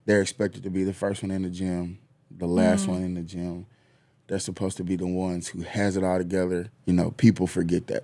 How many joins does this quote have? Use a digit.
1